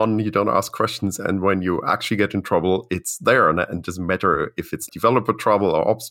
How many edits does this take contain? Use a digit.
1